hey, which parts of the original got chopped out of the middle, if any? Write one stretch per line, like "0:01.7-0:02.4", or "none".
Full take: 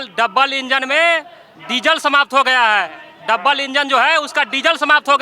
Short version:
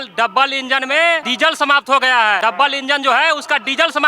0:01.3-0:01.7
0:02.8-0:03.2